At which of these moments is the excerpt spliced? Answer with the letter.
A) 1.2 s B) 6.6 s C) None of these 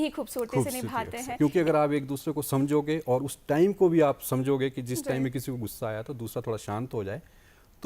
A